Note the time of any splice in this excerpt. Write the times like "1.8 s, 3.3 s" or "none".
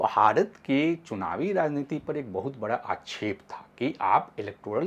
none